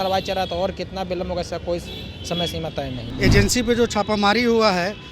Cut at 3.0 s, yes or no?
yes